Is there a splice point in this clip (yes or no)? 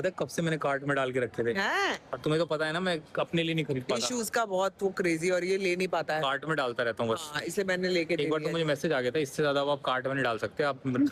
no